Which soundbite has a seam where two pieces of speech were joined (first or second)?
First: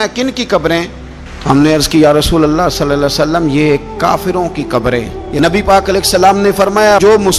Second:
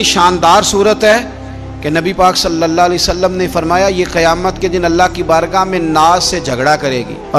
first